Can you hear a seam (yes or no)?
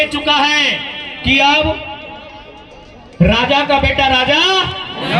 no